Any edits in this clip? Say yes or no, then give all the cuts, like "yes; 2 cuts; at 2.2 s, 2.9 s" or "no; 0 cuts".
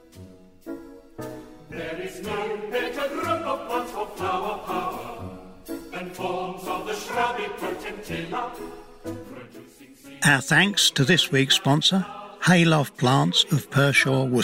yes; 1 cut; at 10.1 s